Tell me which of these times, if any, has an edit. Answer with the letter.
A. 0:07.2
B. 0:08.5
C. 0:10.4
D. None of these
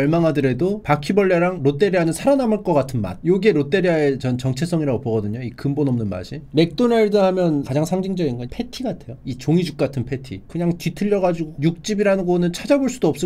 C